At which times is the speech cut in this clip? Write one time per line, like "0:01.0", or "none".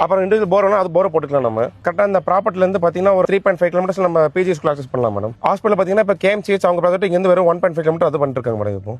0:01.8
0:05.4